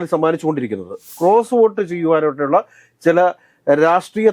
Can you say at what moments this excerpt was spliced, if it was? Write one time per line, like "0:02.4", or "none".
0:01.1